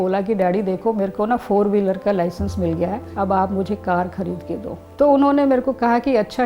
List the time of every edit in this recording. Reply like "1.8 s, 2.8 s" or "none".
3.0 s, 4.8 s